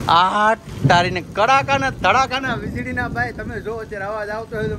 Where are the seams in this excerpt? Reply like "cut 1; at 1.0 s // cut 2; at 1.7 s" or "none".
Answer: none